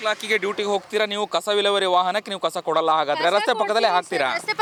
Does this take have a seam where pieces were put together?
no; 0 cuts

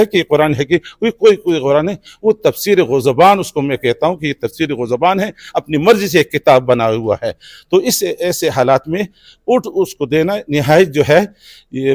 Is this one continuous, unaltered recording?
yes; 0 cuts

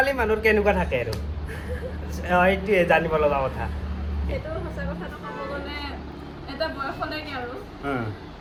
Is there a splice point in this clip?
no; 0 cuts

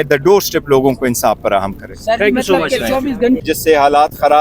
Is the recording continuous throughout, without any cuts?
no; 1 cut; at 3.4 s

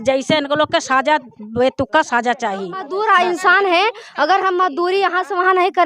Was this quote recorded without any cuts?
no; 1 cut; at 2.8 s

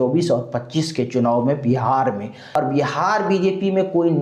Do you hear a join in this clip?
yes; 1 cut; at 2.4 s

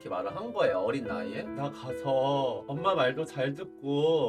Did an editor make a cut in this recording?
yes; 1 cut; at 1.4 s

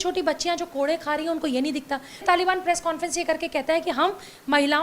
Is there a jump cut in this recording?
yes; 1 cut; at 2.2 s

